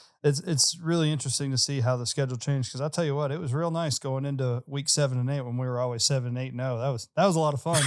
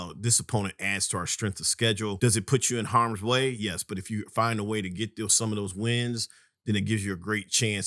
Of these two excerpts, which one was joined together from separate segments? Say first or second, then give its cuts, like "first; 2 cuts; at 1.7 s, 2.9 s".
second; 1 cut; at 2.2 s